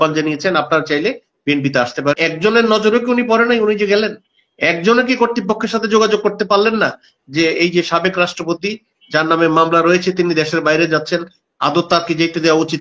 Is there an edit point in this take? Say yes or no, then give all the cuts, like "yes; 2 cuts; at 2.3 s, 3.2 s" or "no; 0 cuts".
yes; 1 cut; at 2.2 s